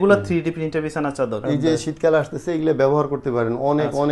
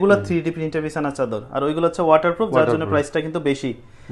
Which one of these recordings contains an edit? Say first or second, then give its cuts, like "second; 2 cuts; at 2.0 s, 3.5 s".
first; 1 cut; at 1.4 s